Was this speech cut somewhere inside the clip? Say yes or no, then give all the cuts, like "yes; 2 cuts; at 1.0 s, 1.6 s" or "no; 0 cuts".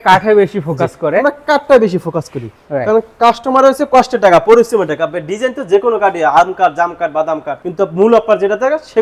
no; 0 cuts